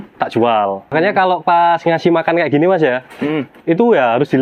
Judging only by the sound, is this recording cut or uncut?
cut